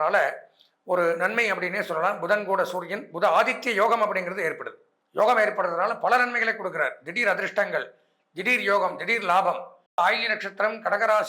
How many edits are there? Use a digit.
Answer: 1